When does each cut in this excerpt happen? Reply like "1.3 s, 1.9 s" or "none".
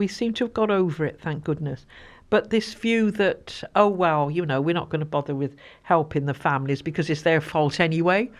none

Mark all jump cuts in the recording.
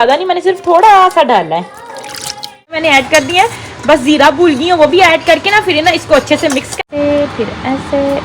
2.8 s, 6.8 s

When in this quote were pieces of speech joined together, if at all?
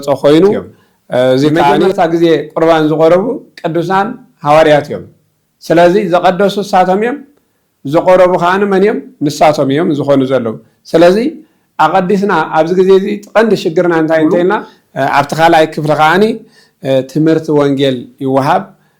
1.9 s, 14.8 s

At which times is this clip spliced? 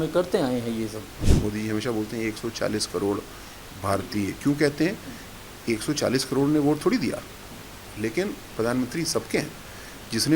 1.3 s

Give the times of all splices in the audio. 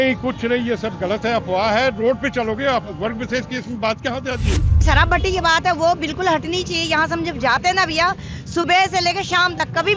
4.8 s

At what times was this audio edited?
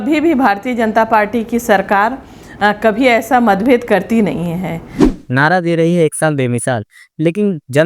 5.0 s

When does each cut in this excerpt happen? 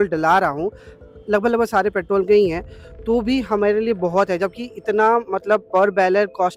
none

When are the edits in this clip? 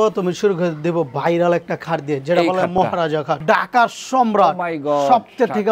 3.3 s

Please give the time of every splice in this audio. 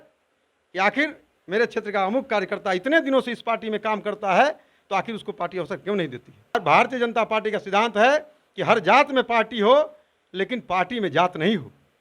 6.5 s

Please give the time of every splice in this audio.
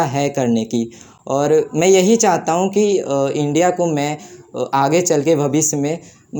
none

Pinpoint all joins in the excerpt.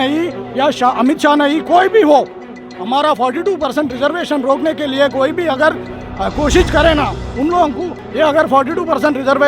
8.0 s

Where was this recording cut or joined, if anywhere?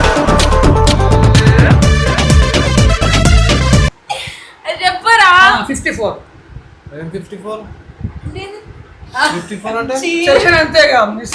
none

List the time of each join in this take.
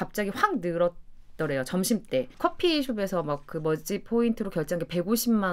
2.3 s

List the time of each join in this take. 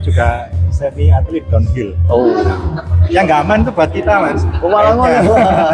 none

